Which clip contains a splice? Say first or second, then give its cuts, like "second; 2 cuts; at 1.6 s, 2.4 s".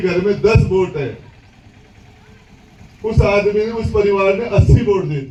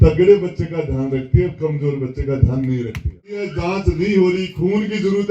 second; 1 cut; at 3.5 s